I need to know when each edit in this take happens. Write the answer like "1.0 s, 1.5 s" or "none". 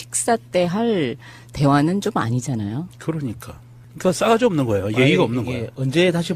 3.7 s